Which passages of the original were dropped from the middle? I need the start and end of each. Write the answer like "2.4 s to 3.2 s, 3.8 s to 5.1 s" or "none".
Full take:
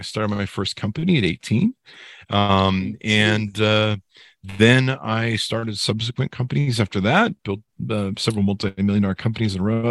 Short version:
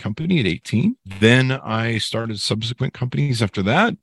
1.8 s to 4.4 s

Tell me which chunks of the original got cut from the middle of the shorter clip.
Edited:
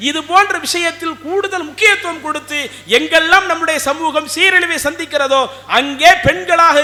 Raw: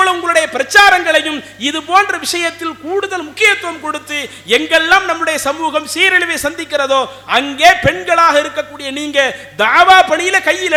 none

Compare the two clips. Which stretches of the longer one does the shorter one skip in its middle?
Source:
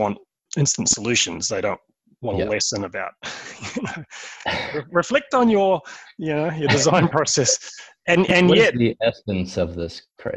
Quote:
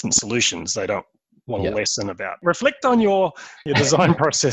3.1 s to 4.9 s, 6.1 s to 6.5 s

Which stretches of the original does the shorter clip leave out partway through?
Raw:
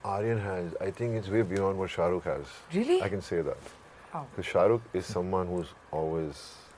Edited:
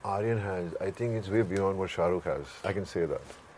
2.7 s to 3.0 s

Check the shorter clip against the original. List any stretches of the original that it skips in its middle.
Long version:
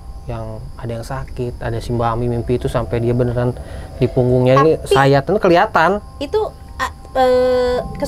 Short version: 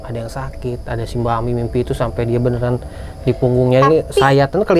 none

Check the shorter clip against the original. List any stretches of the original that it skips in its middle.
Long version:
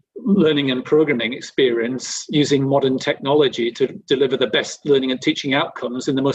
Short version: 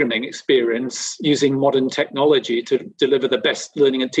none

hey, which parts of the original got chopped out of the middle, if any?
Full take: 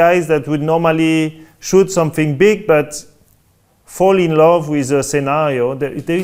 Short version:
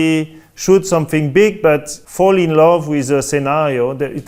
3.0 s to 3.8 s

